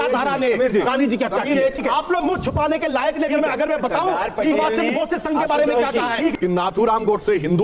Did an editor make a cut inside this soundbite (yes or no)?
yes